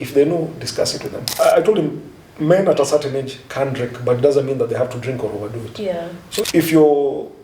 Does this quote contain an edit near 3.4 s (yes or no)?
no